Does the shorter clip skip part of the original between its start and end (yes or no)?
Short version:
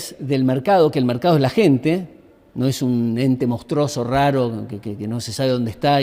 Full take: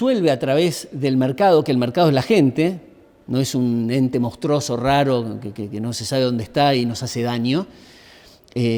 no